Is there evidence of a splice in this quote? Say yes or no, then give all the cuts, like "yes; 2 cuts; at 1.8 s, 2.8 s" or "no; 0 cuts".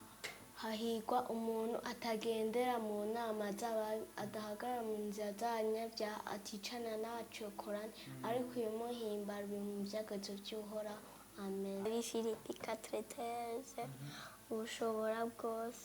yes; 1 cut; at 11.9 s